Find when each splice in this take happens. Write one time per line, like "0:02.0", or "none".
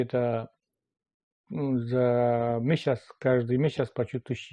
none